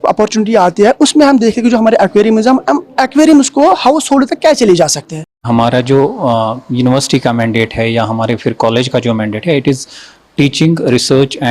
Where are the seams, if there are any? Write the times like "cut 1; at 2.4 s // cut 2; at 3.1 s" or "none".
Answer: cut 1; at 5.5 s